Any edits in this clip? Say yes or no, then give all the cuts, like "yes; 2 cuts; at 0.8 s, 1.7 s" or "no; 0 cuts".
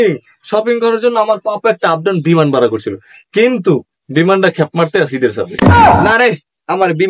no; 0 cuts